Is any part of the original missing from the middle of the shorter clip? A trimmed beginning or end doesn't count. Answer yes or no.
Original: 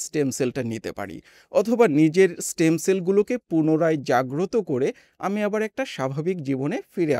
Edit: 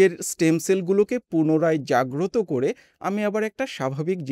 no